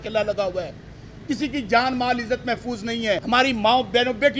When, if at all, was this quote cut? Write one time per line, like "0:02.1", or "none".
0:03.2